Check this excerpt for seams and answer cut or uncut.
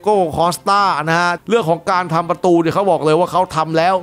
cut